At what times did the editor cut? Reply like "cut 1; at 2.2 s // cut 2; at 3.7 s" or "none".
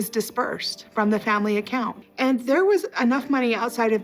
cut 1; at 2.0 s